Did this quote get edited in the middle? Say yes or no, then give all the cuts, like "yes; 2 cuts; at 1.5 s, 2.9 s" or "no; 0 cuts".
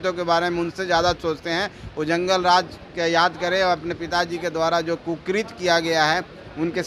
no; 0 cuts